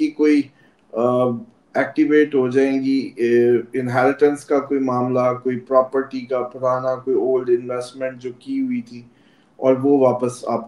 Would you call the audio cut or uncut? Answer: uncut